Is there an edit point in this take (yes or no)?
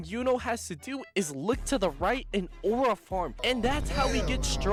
no